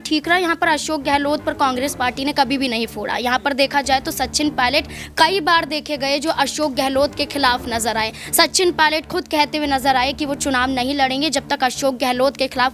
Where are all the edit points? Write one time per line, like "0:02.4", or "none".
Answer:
none